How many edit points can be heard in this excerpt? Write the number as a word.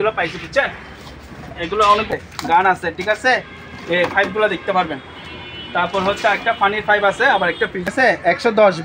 two